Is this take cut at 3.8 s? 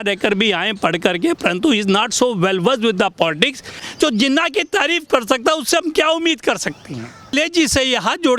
yes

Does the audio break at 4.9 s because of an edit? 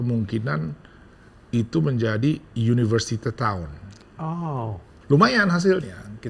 yes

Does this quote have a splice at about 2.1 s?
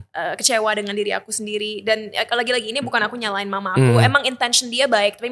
no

